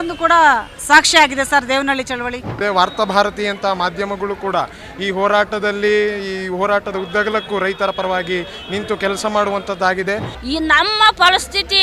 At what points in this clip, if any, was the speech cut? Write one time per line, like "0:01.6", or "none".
0:02.5
0:10.3